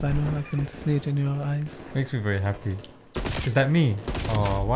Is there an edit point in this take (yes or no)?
yes